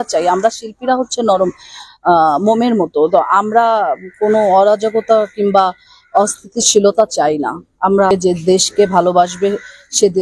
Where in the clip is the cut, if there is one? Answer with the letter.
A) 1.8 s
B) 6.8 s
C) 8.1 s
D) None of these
C